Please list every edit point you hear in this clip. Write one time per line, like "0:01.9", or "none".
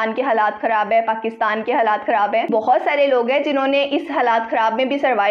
0:02.5

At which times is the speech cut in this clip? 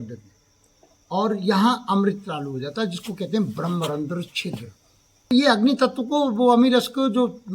0:05.3

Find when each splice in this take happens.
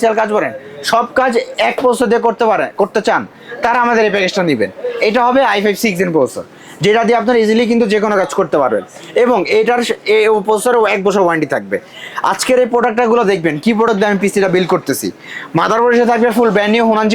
none

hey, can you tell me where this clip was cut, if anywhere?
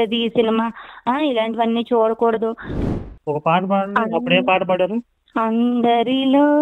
0:02.7
0:05.2

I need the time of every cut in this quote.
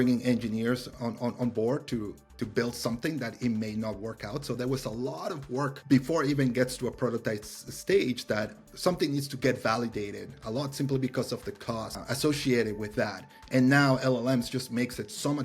0:05.8
0:12.0

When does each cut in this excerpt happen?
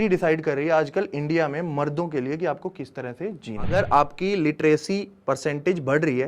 0:03.7

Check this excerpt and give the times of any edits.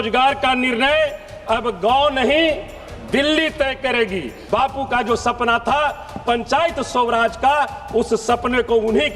0:04.3

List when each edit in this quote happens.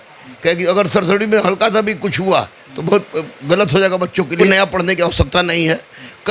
0:04.4

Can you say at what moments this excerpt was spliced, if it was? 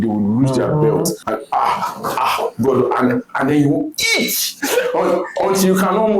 0:01.2
0:04.5

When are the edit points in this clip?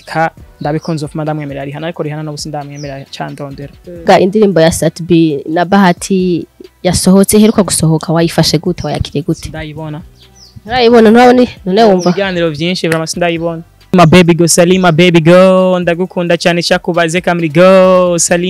0:04.1
0:13.9

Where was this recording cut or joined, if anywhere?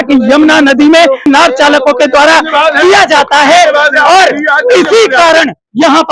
0:01.3

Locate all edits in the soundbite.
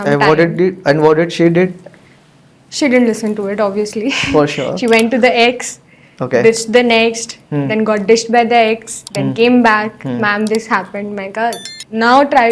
none

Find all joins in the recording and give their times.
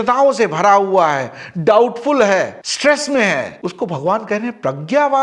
none

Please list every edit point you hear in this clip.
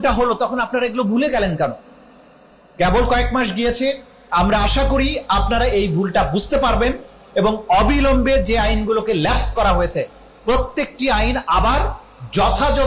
none

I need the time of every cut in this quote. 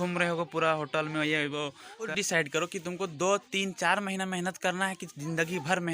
0:02.1

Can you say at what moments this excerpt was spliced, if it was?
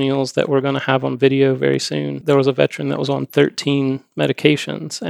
0:02.2

